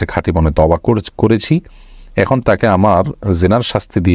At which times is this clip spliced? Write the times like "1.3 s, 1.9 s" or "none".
none